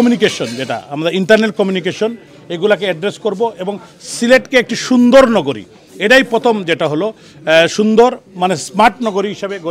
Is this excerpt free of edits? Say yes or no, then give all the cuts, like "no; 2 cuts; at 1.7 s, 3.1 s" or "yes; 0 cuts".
yes; 0 cuts